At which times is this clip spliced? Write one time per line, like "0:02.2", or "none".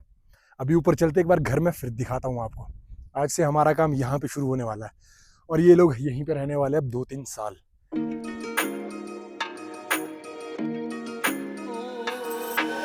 none